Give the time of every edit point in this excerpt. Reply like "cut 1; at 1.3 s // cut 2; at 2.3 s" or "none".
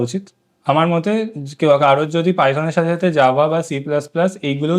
none